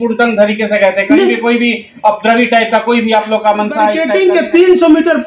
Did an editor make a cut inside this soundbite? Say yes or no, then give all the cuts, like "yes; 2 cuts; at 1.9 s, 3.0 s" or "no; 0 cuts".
yes; 1 cut; at 4.0 s